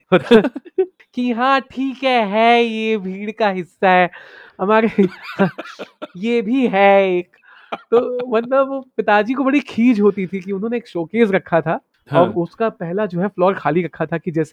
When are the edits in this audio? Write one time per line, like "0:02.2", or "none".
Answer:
0:01.0
0:11.9